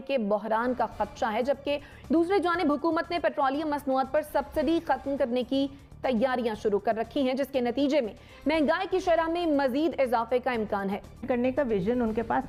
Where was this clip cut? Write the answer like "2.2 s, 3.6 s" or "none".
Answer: none